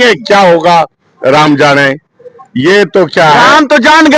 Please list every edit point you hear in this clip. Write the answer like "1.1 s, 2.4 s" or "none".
none